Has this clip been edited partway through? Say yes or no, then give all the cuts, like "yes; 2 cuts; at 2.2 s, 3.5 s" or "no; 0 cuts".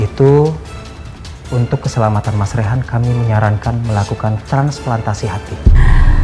no; 0 cuts